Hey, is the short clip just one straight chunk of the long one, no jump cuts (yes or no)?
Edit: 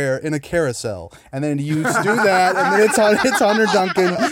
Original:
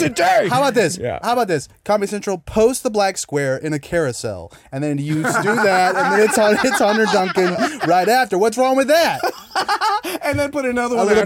yes